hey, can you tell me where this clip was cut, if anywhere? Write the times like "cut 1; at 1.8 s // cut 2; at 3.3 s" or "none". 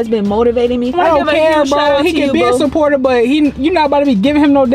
cut 1; at 0.9 s